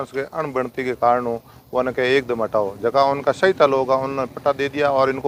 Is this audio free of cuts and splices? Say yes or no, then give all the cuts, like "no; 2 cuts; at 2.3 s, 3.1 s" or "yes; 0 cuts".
yes; 0 cuts